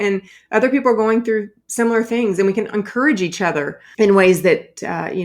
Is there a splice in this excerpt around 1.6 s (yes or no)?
yes